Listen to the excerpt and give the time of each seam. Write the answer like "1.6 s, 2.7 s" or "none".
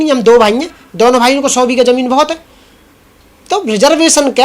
none